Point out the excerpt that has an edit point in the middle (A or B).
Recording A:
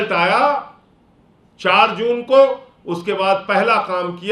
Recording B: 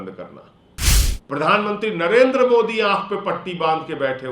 B